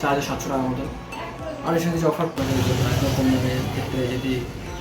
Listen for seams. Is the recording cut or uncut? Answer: cut